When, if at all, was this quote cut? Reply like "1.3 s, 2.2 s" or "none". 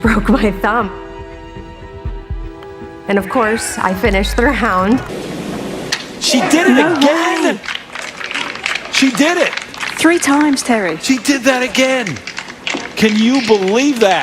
5.2 s

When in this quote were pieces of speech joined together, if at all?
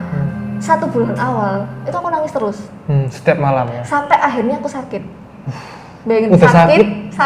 1.8 s

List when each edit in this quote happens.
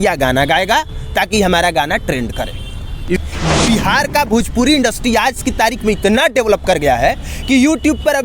3.2 s

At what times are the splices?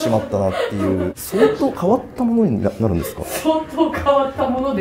1.2 s

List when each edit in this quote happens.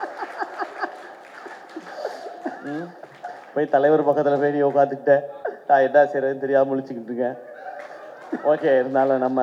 none

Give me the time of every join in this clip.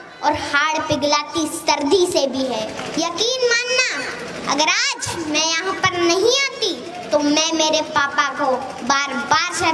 2.8 s

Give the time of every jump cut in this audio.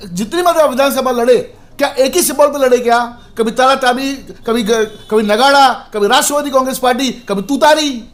none

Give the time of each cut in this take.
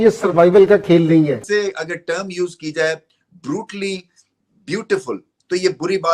1.4 s

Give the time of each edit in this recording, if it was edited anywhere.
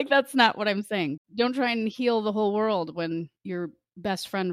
1.2 s, 3.3 s

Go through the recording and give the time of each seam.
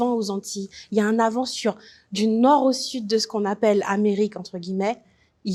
none

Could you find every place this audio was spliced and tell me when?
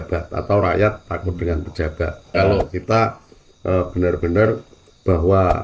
2.3 s

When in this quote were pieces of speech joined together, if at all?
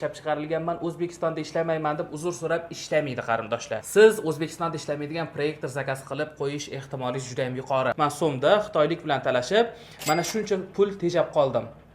3.9 s, 8.0 s

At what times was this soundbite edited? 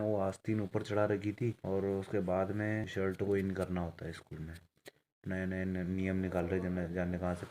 1.6 s, 2.9 s

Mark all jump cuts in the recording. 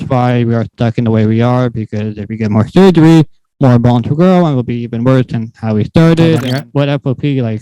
6.4 s

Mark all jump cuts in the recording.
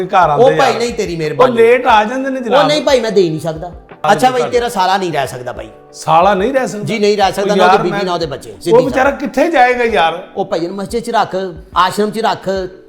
4.0 s

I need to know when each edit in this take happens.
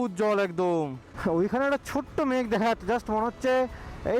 1.1 s

